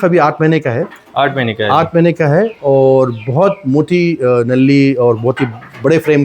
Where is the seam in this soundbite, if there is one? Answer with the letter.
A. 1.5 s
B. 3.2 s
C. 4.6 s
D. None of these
D